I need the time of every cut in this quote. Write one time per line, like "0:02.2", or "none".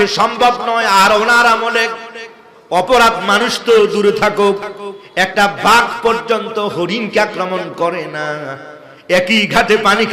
none